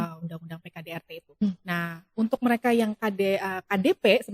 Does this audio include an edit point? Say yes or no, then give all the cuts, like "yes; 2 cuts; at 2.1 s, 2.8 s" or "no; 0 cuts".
yes; 1 cut; at 1.4 s